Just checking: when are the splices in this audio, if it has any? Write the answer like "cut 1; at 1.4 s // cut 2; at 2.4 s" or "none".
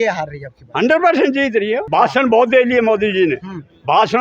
cut 1; at 1.9 s